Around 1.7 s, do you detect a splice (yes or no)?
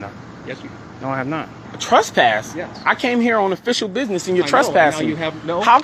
yes